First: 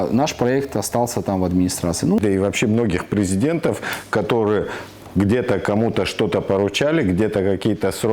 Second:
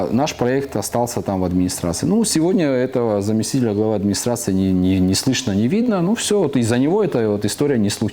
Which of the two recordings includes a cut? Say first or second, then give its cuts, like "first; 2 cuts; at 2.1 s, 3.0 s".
first; 1 cut; at 2.2 s